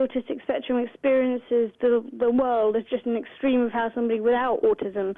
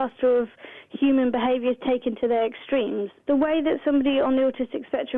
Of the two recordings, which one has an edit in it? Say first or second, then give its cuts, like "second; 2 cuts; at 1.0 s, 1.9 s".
second; 1 cut; at 3.1 s